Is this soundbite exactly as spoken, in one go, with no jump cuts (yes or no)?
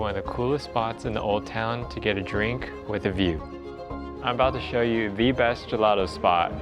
no